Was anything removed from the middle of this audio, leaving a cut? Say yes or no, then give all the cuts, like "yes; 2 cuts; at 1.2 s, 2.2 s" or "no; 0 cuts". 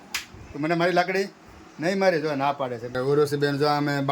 yes; 1 cut; at 2.9 s